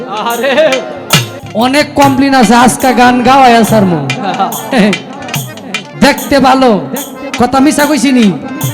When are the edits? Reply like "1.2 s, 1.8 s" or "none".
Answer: 1.4 s